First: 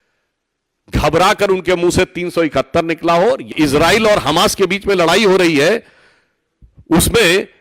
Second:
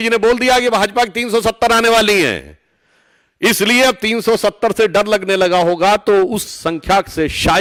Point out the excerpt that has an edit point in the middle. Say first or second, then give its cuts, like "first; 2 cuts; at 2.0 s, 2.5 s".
first; 1 cut; at 3.5 s